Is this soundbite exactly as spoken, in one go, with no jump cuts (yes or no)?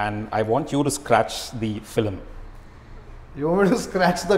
yes